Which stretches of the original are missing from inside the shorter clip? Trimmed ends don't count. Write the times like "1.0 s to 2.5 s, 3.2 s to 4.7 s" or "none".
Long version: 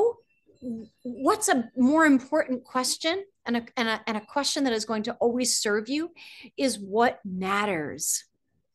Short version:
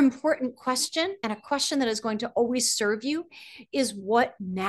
3.3 s to 4.0 s